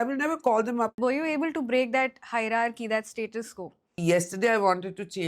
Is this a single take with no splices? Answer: no; 2 cuts; at 0.9 s, 4.0 s

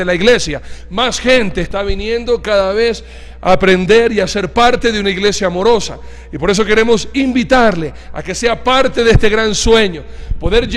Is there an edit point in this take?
yes; 1 cut; at 5.7 s

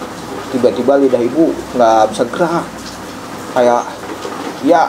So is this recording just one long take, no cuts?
yes; 0 cuts

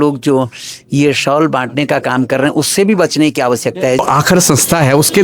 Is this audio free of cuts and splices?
no; 1 cut; at 4.0 s

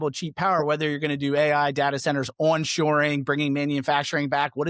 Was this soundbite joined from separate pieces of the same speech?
no; 0 cuts

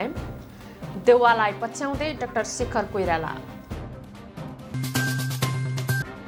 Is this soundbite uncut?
yes; 0 cuts

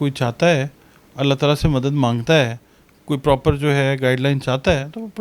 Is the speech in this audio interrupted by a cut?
no; 0 cuts

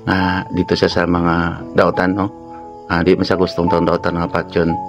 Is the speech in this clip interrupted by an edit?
no; 0 cuts

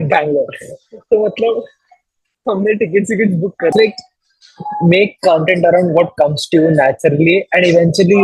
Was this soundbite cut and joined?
yes; 1 cut; at 3.7 s

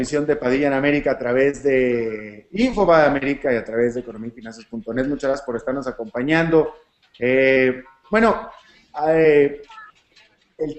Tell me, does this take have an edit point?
no; 0 cuts

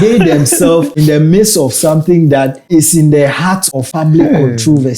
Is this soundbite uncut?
no; 3 cuts; at 0.9 s, 2.6 s, 3.8 s

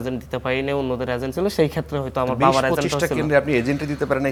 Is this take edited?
no; 0 cuts

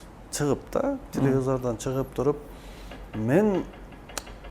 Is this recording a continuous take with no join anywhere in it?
yes; 0 cuts

